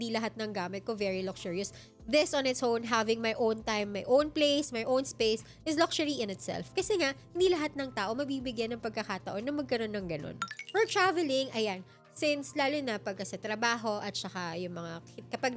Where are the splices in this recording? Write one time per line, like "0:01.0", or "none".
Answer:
none